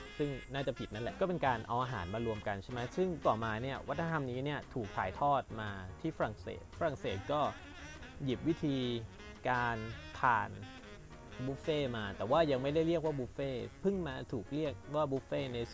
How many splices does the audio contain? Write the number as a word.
two